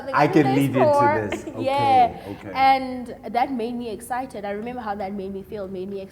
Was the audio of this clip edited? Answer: no; 0 cuts

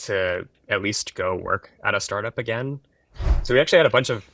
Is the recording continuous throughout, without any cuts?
no; 1 cut; at 3.1 s

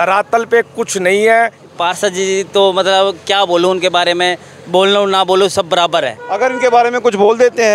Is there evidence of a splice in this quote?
yes; 2 cuts; at 1.6 s, 6.2 s

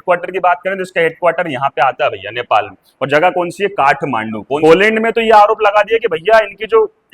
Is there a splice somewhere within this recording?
yes; 1 cut; at 4.6 s

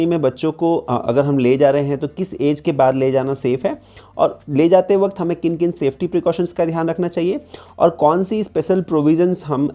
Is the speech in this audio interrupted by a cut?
no; 0 cuts

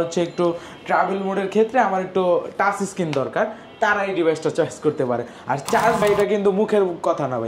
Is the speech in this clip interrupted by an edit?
yes; 1 cut; at 6.0 s

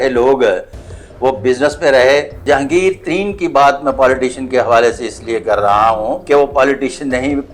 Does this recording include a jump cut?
yes; 2 cuts; at 2.4 s, 6.2 s

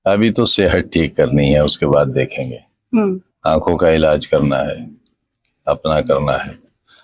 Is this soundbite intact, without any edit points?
yes; 0 cuts

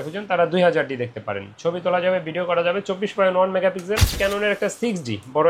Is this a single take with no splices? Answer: no; 1 cut; at 4.2 s

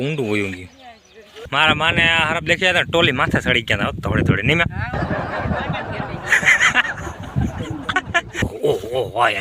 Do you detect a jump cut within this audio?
yes; 2 cuts; at 1.4 s, 8.4 s

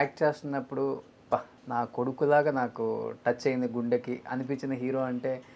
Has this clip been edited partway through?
yes; 1 cut; at 1.6 s

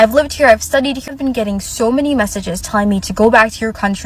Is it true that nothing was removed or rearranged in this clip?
no; 1 cut; at 1.0 s

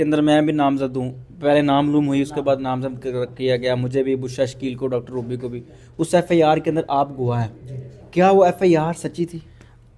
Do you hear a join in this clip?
no; 0 cuts

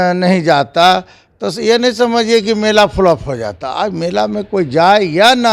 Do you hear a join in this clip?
no; 0 cuts

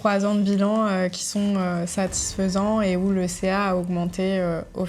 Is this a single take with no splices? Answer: yes; 0 cuts

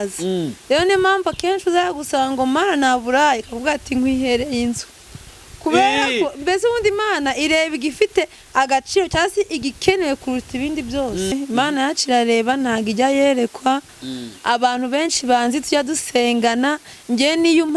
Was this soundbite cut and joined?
yes; 1 cut; at 11.3 s

